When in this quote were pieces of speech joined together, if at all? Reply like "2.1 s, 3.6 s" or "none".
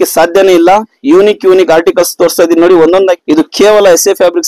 0.9 s, 3.2 s